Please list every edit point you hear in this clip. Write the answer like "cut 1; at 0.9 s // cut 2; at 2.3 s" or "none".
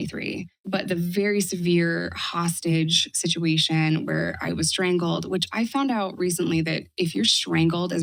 none